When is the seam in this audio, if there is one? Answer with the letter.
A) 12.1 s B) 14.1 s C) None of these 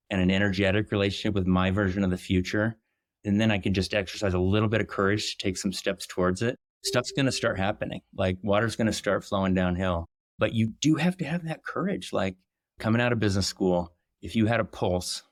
C